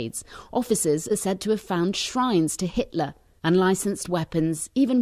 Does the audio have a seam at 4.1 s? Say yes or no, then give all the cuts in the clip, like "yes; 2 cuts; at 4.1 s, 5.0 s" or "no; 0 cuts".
no; 1 cut; at 1.9 s